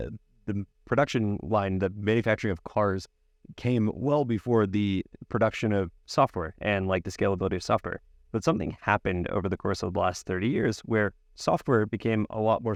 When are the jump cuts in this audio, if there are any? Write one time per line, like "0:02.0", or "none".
none